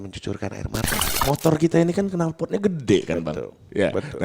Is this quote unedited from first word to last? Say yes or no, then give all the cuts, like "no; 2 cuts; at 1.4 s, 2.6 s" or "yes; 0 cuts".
no; 1 cut; at 1.1 s